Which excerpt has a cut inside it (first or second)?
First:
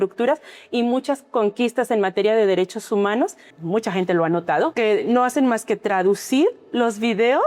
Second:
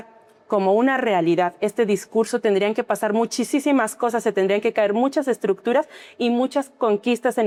first